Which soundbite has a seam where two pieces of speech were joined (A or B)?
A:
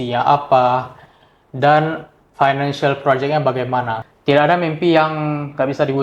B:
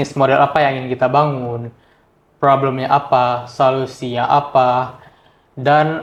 A